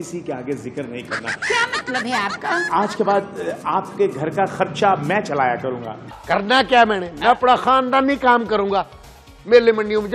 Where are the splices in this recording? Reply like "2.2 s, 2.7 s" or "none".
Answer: 6.1 s